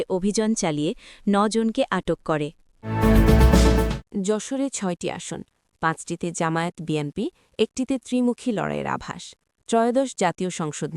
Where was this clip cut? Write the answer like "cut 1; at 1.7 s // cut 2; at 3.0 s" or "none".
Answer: cut 1; at 2.8 s // cut 2; at 4.0 s

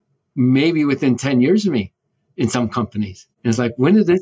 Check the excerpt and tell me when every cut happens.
cut 1; at 3.3 s

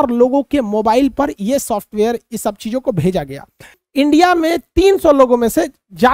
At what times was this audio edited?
cut 1; at 3.8 s

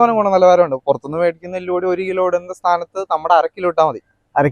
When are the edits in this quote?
none

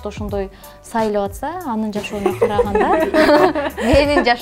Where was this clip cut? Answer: none

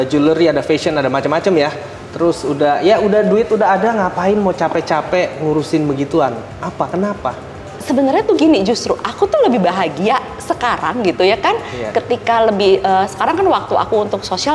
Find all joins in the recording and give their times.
none

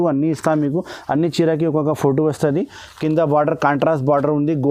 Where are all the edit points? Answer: none

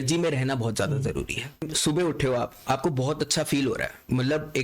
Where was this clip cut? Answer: cut 1; at 1.7 s

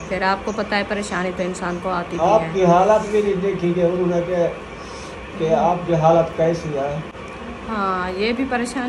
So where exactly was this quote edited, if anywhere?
cut 1; at 7.2 s

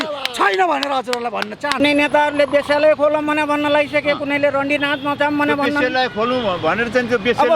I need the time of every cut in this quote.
cut 1; at 1.8 s

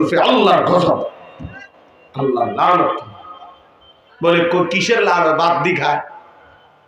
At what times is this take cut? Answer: none

